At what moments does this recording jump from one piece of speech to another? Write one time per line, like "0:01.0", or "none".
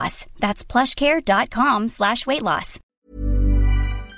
0:02.9